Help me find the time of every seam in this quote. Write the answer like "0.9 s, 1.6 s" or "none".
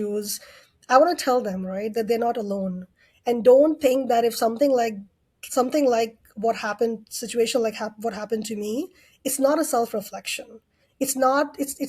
none